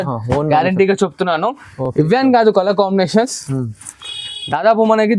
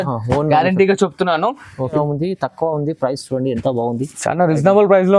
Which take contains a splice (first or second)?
second